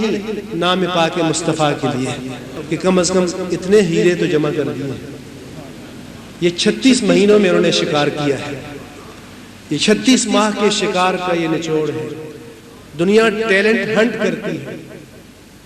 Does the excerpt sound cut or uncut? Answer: cut